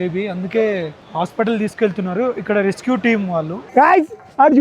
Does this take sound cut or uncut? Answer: cut